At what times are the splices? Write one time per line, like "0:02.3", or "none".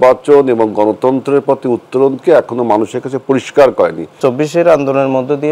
0:04.2